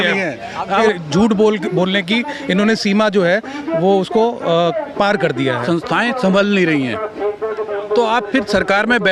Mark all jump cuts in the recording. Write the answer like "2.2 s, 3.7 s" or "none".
0.8 s, 5.6 s